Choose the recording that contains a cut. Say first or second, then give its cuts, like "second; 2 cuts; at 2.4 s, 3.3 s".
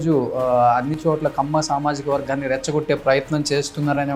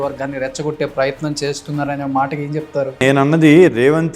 second; 1 cut; at 3.0 s